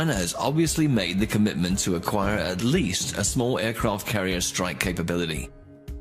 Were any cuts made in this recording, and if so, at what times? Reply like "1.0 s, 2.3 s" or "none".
2.1 s